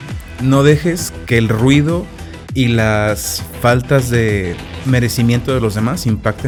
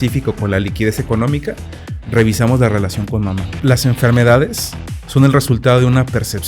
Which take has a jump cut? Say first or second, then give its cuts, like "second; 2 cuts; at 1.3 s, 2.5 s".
second; 1 cut; at 3.5 s